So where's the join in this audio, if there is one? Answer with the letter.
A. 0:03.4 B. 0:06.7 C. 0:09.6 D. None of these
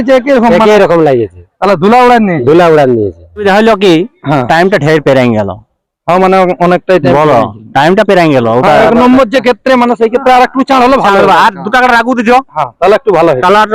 A